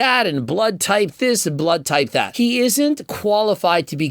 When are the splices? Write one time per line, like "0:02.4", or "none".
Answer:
0:02.3

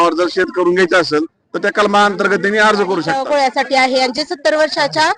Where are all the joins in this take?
0:03.1

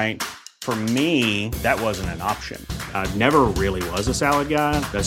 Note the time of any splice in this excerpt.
none

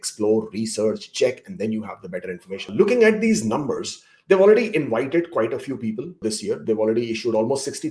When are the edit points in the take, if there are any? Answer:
0:02.6

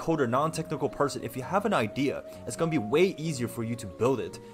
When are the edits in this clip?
none

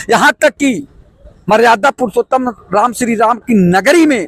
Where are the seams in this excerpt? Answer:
none

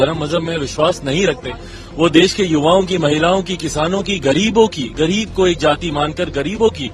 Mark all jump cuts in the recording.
none

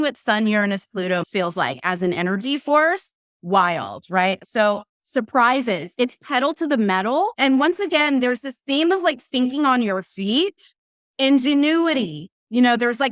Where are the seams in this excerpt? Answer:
0:01.2
0:04.4
0:05.9
0:07.3

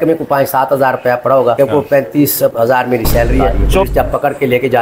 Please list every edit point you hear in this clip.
0:03.9

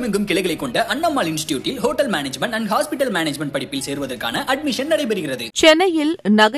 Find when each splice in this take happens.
0:05.5

